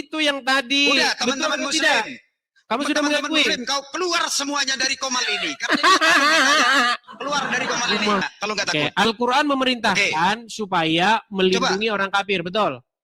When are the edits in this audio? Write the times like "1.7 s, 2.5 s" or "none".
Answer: 8.3 s